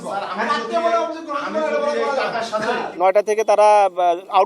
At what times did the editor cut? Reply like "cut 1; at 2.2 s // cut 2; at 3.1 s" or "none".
cut 1; at 2.9 s